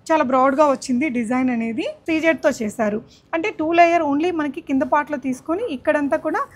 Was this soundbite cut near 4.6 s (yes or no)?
no